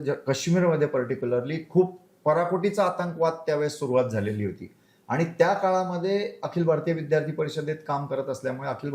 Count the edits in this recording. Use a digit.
0